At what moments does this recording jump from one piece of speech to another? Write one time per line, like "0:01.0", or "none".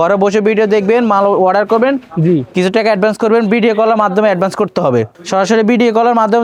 none

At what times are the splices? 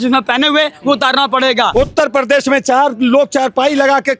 0:01.7

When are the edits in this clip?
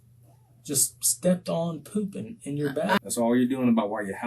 0:03.0

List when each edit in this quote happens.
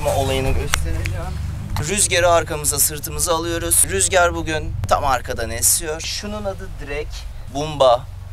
0:01.8
0:04.7
0:06.1
0:07.4

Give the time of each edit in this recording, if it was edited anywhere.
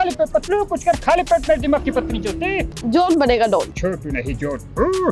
0:02.8
0:03.7

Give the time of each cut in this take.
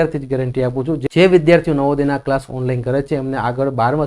0:01.0

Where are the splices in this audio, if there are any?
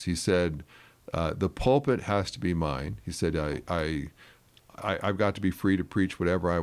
none

